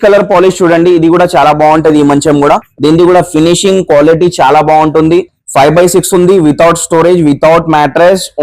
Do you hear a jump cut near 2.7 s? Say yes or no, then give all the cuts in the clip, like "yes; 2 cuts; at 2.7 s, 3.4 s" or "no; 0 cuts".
yes; 1 cut; at 2.7 s